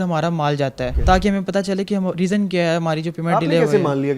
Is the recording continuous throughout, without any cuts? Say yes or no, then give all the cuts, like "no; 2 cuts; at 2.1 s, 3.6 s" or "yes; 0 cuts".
no; 1 cut; at 0.9 s